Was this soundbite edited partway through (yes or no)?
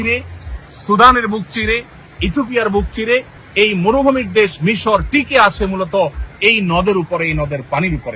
yes